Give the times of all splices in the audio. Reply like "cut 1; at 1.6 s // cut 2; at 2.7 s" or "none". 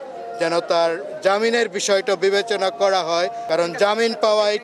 cut 1; at 3.4 s